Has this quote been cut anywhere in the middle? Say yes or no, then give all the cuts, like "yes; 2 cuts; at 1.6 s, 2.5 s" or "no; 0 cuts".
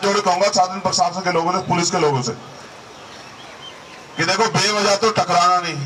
no; 0 cuts